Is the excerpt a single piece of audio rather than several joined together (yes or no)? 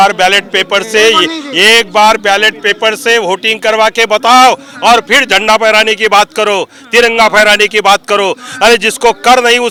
yes